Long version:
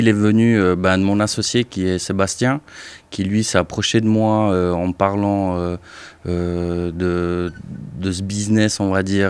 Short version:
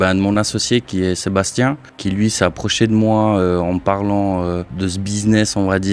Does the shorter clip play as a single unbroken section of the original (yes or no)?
no